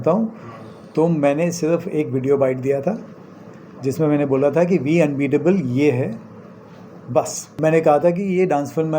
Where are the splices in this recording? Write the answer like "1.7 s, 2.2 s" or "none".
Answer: 7.5 s